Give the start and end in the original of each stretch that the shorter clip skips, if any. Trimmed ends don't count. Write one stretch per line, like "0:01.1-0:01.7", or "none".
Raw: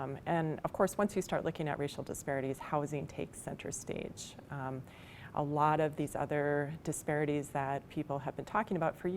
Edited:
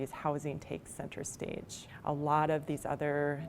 0:04.3-0:05.1